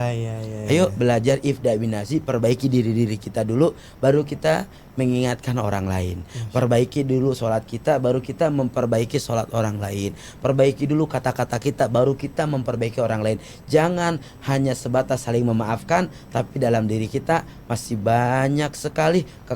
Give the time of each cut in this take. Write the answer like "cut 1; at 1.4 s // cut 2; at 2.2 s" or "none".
none